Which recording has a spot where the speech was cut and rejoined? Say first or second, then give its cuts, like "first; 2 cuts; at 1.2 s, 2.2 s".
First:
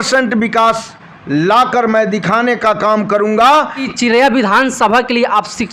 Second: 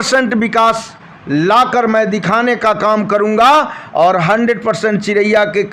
first; 1 cut; at 3.9 s